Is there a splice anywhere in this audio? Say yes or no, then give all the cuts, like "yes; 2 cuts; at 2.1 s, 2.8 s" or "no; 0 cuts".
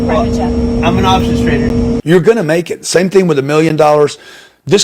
yes; 1 cut; at 2.0 s